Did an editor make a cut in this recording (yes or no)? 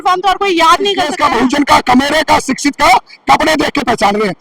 yes